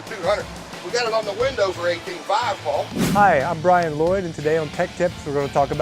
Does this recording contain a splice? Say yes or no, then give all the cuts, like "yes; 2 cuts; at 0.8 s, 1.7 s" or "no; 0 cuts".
yes; 1 cut; at 3.0 s